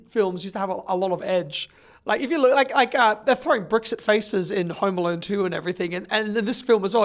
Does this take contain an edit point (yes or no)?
no